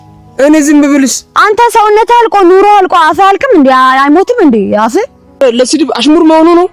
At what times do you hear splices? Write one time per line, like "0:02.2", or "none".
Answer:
0:05.4